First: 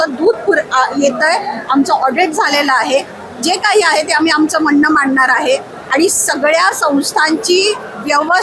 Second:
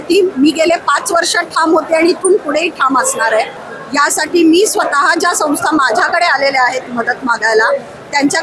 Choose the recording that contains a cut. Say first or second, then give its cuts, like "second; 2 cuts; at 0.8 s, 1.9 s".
second; 1 cut; at 3.6 s